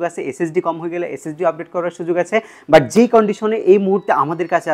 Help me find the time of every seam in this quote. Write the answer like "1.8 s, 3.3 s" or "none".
none